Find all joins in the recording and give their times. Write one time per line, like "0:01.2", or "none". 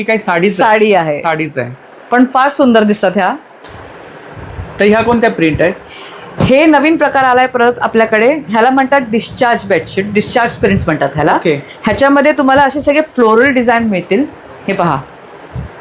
none